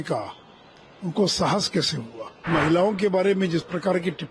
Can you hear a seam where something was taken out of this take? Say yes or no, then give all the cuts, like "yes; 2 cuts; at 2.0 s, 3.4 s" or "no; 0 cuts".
yes; 1 cut; at 2.5 s